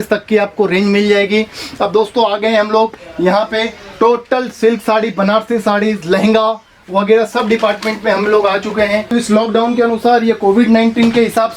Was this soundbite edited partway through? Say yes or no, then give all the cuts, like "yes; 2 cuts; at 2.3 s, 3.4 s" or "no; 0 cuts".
yes; 1 cut; at 9.1 s